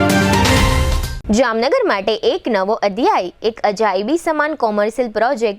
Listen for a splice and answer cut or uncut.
cut